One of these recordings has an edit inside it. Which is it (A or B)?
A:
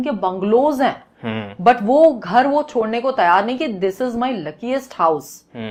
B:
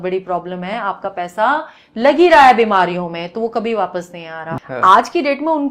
B